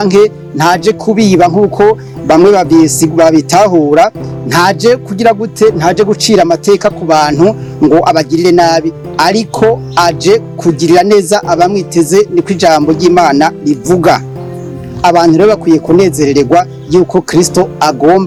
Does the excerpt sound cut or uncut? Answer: uncut